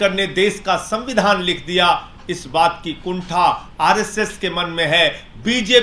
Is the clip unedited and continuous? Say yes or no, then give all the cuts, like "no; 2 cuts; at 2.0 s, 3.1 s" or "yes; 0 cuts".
yes; 0 cuts